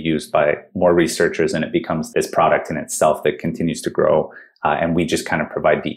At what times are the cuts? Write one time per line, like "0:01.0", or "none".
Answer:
0:02.0